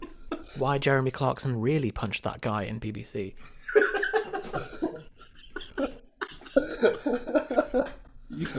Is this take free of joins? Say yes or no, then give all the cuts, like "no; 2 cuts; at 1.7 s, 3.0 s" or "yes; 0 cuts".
yes; 0 cuts